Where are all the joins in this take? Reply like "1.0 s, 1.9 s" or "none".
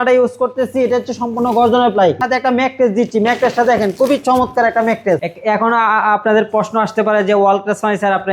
2.2 s, 5.2 s